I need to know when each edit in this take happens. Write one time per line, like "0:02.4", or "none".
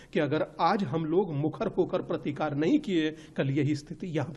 none